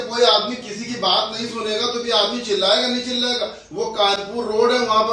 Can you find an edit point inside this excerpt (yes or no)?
no